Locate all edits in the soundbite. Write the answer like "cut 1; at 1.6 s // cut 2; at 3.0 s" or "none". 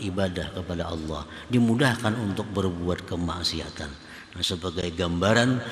none